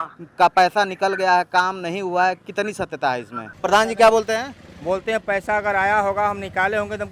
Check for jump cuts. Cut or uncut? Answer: cut